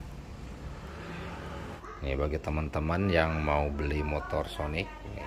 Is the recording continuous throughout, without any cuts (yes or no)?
no